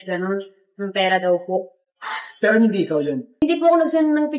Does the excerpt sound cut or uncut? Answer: cut